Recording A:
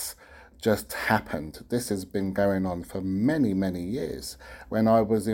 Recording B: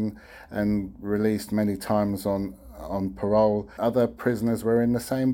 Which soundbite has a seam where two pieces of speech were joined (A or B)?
B